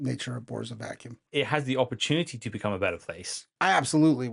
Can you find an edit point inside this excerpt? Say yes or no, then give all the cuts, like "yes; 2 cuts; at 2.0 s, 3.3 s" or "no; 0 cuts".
yes; 2 cuts; at 1.3 s, 3.4 s